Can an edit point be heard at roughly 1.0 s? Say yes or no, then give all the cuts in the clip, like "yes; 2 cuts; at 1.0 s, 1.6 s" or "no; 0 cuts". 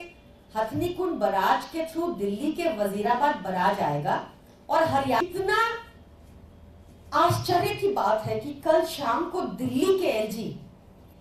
no; 1 cut; at 5.2 s